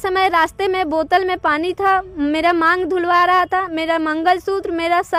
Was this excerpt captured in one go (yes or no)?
yes